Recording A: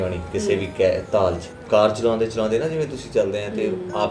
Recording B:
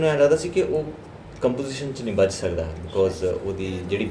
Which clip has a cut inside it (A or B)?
A